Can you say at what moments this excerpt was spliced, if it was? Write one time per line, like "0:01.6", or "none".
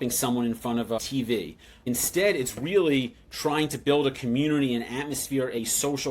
0:01.7